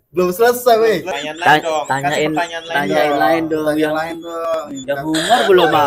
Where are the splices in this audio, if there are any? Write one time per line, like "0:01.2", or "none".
0:01.2